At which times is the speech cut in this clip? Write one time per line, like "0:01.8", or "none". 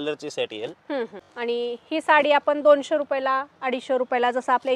0:01.2

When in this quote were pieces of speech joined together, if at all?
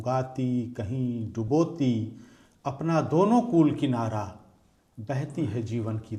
none

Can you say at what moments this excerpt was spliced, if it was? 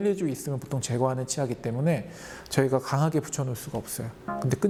none

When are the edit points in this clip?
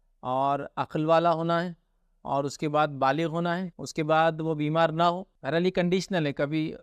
0:03.8
0:05.3

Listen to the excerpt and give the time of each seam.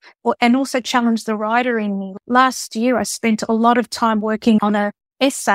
0:04.6

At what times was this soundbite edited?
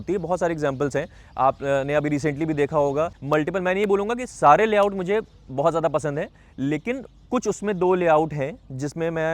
0:03.2

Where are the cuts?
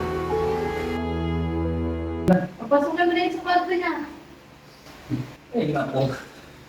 0:02.3

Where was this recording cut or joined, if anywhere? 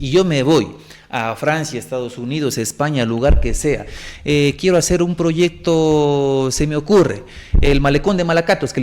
0:04.0

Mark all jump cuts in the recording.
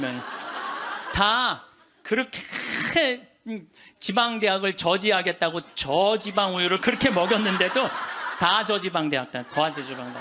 none

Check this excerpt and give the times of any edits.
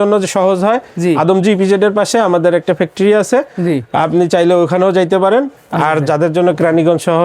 0:05.6

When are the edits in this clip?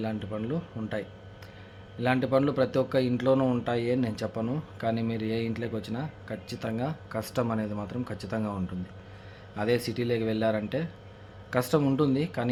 none

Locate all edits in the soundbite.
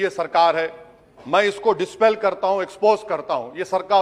none

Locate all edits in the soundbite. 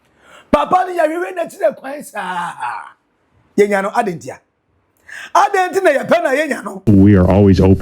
0:06.8

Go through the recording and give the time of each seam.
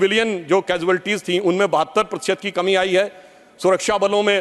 none

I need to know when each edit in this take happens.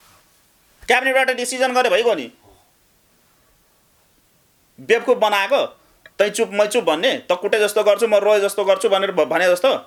none

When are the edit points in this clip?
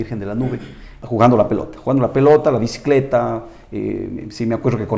0:01.0

